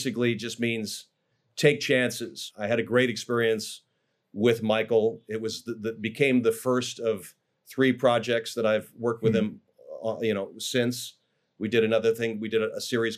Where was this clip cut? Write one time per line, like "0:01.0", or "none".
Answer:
0:02.4